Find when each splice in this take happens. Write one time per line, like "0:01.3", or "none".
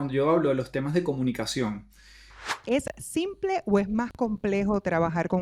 0:02.4